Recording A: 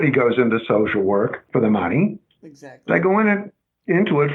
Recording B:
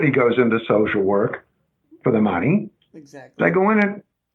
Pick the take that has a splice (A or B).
A